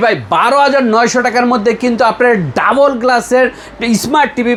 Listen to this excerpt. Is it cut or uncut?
uncut